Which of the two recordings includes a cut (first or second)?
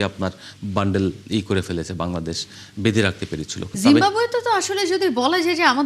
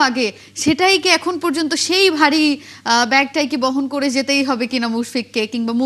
first